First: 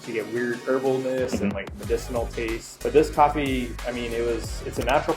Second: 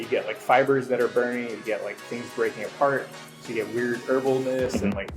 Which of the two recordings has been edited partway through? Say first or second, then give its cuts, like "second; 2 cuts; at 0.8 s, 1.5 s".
first; 1 cut; at 2.7 s